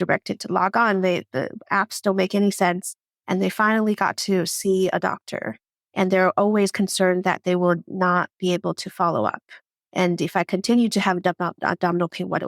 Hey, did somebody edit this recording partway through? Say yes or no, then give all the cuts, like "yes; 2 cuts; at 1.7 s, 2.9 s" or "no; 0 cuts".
no; 0 cuts